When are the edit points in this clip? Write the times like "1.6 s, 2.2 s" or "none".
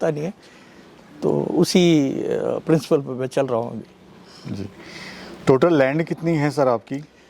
none